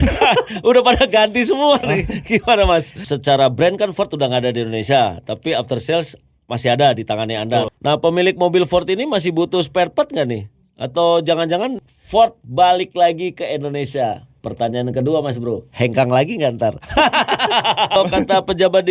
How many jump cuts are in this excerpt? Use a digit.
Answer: 4